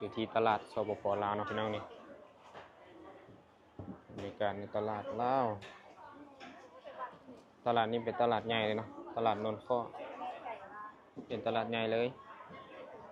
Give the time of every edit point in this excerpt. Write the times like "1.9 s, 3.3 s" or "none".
none